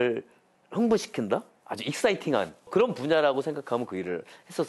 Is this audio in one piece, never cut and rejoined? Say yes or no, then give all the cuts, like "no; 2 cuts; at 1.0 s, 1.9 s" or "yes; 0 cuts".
no; 1 cut; at 2.7 s